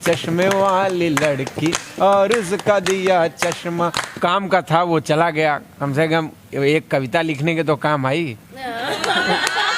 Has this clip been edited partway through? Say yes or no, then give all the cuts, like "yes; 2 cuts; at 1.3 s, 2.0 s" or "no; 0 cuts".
yes; 1 cut; at 4.2 s